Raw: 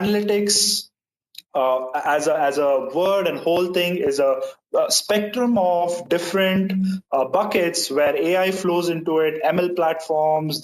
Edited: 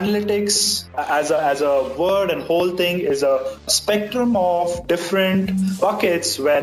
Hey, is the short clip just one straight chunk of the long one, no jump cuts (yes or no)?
no